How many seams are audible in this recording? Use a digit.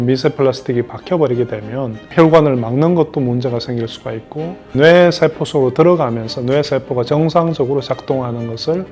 0